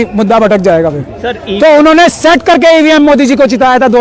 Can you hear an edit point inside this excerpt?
no; 0 cuts

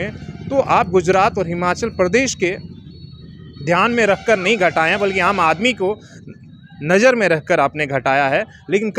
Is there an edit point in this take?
no; 0 cuts

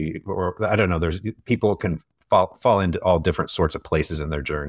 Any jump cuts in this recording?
no; 0 cuts

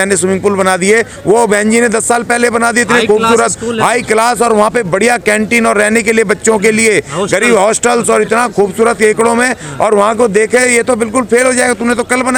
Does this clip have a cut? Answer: no; 0 cuts

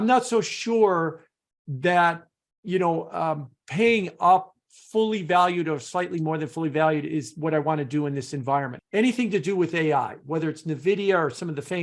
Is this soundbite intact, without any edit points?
no; 1 cut; at 8.7 s

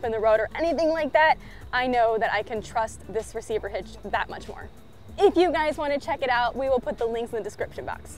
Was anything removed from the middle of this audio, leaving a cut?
no; 0 cuts

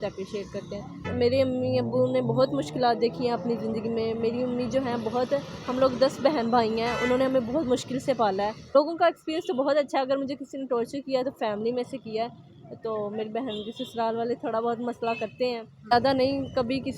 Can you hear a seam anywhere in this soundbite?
yes; 3 cuts; at 1.0 s, 8.6 s, 15.9 s

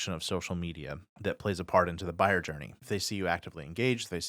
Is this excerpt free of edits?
no; 2 cuts; at 1.0 s, 2.8 s

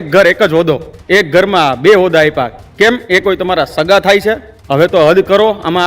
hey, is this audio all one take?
no; 3 cuts; at 0.9 s, 2.6 s, 4.5 s

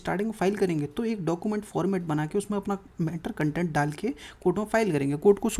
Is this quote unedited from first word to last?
yes; 0 cuts

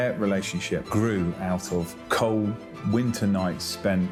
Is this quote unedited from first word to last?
yes; 0 cuts

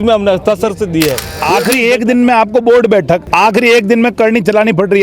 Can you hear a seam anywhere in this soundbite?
yes; 2 cuts; at 1.3 s, 3.3 s

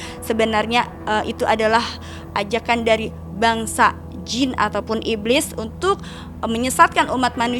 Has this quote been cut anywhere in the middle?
no; 0 cuts

